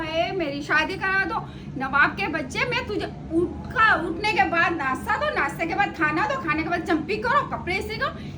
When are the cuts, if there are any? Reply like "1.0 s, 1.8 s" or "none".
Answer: none